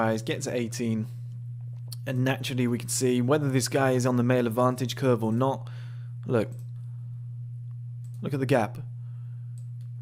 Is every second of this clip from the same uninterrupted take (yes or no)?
yes